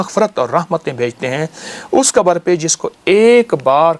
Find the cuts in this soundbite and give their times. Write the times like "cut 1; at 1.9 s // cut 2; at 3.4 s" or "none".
none